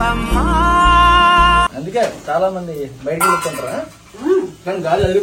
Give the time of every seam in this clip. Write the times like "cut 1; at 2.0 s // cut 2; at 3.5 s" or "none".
none